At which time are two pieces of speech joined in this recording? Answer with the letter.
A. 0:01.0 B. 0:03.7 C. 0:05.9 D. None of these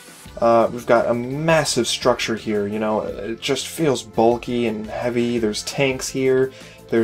B